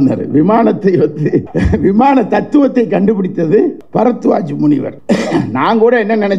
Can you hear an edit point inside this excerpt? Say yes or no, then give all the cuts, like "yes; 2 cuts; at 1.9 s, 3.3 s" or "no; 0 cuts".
yes; 3 cuts; at 1.5 s, 3.8 s, 4.9 s